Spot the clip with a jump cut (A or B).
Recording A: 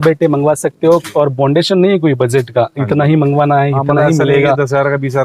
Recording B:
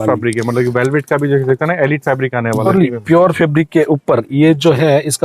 B